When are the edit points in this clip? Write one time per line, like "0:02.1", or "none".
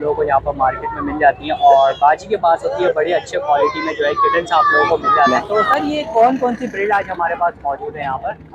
0:05.4